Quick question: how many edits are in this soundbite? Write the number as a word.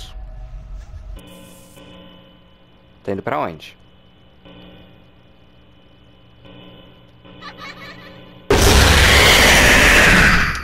one